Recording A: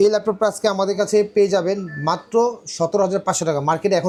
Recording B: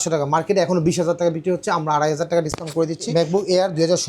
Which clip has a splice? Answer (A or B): B